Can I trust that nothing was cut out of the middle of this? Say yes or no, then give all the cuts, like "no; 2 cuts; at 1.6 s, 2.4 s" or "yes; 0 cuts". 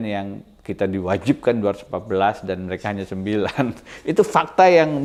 yes; 0 cuts